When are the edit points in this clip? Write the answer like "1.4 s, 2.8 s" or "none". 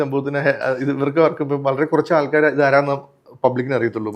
none